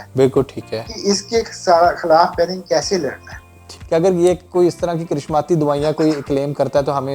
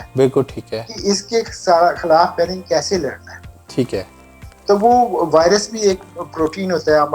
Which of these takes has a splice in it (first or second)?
first